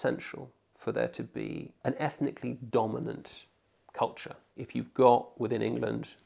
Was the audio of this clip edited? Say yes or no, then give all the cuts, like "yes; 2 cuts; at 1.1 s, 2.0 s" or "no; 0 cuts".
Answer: yes; 2 cuts; at 1.7 s, 4.5 s